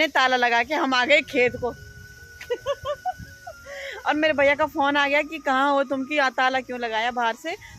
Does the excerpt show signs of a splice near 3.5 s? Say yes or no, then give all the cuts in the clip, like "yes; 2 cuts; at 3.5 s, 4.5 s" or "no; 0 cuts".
no; 0 cuts